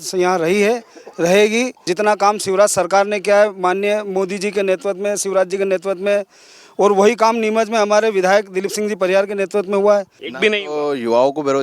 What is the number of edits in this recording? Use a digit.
2